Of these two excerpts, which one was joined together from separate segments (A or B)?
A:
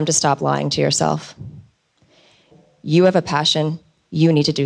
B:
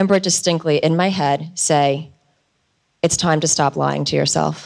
A